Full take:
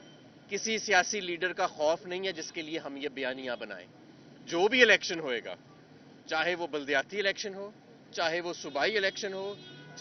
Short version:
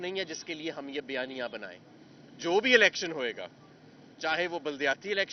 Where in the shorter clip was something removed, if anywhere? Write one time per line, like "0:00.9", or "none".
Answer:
none